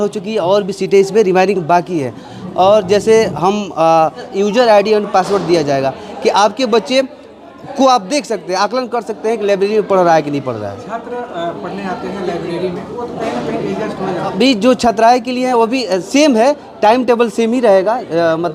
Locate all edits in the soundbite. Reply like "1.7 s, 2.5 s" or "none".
4.3 s, 14.3 s